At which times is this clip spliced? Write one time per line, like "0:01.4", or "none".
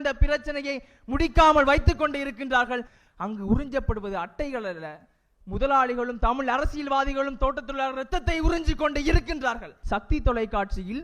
0:02.9
0:09.7